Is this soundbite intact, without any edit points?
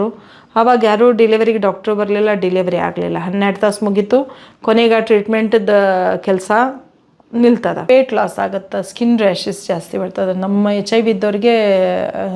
no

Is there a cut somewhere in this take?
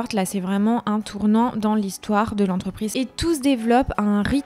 yes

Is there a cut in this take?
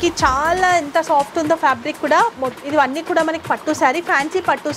no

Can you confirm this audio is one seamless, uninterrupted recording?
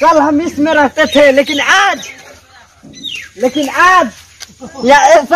yes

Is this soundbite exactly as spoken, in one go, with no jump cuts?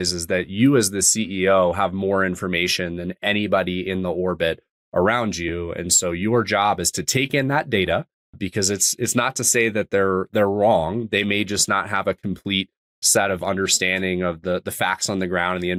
yes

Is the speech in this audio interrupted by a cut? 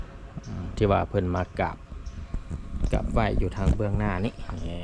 no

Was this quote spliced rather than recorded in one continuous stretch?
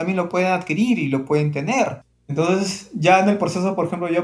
no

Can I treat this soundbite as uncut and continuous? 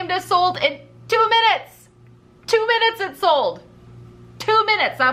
yes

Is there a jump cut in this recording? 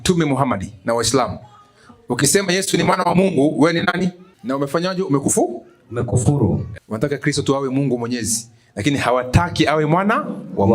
yes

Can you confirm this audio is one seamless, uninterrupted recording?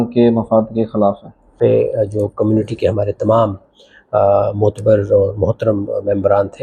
no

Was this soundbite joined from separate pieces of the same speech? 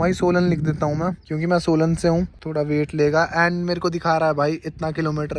yes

